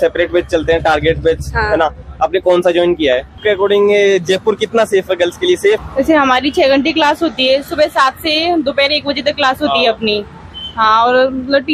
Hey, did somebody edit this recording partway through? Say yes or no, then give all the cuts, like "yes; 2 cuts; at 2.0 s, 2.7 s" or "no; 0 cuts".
yes; 2 cuts; at 3.4 s, 5.8 s